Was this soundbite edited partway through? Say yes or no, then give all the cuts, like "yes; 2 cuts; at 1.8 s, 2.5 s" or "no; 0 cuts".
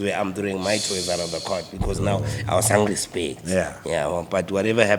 no; 0 cuts